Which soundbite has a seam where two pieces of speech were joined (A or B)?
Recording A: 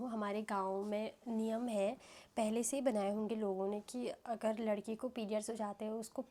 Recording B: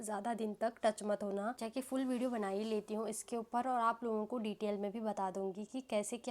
B